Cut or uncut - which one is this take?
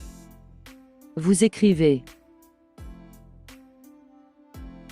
cut